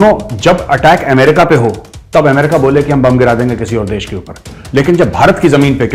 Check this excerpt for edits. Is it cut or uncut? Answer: uncut